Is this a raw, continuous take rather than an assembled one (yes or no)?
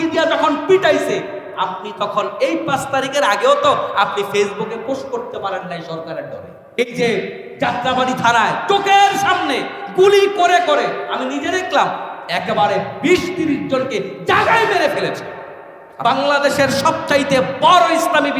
no